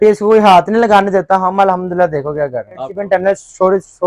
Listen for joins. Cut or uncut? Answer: cut